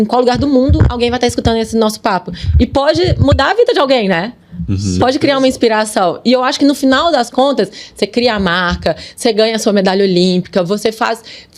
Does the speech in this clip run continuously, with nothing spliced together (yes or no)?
yes